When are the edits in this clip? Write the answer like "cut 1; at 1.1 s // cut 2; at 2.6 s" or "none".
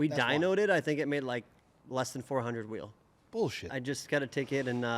cut 1; at 3.7 s

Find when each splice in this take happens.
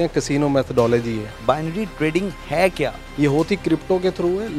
cut 1; at 1.3 s // cut 2; at 3.0 s

